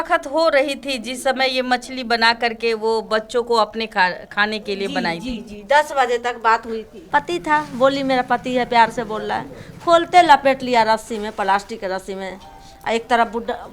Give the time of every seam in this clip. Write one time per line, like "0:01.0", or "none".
0:06.9